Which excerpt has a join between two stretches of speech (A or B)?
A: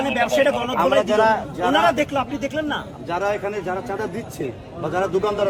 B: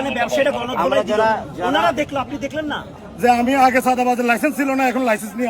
B